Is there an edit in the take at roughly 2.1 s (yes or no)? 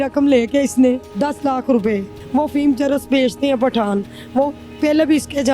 yes